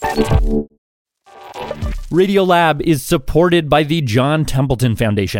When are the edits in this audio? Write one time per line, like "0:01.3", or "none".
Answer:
0:00.9